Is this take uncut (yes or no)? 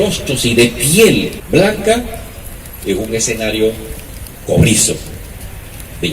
no